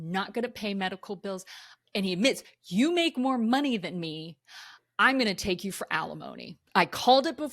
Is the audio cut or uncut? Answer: cut